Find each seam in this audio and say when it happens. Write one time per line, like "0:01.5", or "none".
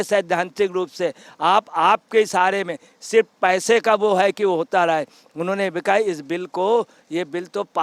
none